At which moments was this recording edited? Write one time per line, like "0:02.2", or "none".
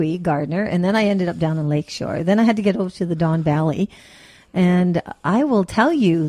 none